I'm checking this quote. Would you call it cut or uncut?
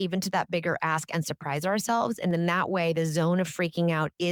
uncut